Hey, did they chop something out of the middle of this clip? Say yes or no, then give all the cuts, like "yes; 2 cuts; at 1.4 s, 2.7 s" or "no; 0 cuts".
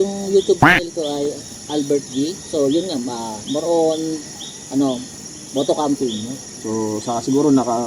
yes; 1 cut; at 6.5 s